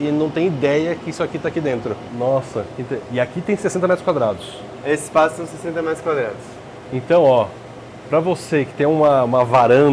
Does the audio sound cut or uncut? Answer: cut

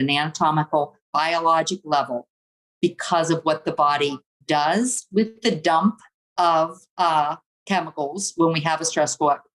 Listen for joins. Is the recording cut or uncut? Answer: uncut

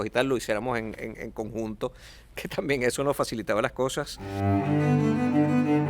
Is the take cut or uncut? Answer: cut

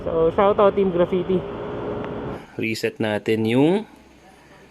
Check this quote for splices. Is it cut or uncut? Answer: cut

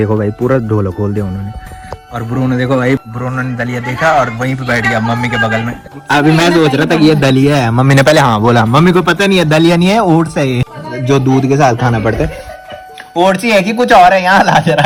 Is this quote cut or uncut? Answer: uncut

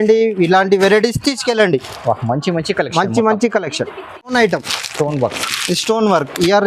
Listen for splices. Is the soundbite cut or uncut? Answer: uncut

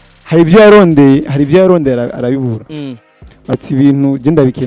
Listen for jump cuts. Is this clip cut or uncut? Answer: cut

